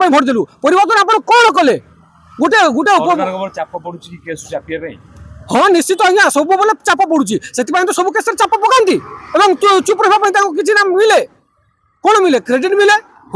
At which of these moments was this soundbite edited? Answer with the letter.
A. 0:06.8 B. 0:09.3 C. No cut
C